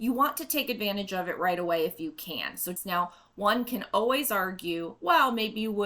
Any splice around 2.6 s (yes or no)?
yes